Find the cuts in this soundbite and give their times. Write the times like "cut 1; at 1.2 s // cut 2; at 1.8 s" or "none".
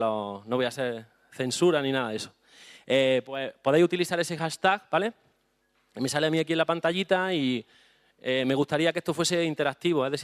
cut 1; at 5.4 s